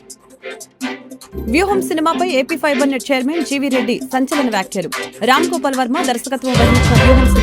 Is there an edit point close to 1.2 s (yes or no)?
yes